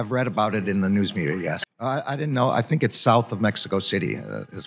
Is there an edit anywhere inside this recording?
no; 0 cuts

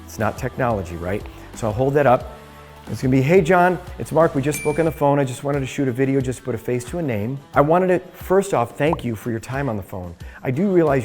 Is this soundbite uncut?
no; 1 cut; at 7.4 s

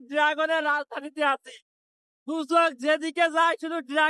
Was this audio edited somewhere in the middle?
no; 0 cuts

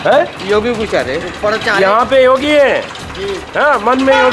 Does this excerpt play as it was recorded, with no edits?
yes; 0 cuts

